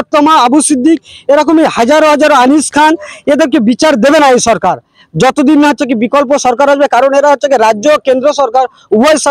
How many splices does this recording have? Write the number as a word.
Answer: zero